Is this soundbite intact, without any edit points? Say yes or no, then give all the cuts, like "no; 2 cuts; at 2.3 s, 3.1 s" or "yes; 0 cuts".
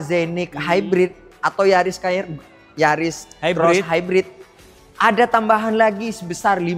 yes; 0 cuts